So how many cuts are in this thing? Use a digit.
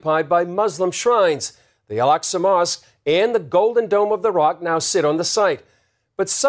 0